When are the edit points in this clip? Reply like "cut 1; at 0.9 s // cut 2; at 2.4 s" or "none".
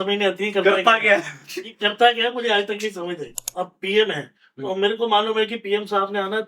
cut 1; at 3.4 s